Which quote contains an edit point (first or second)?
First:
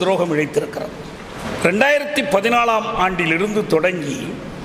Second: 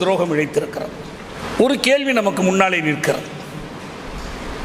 second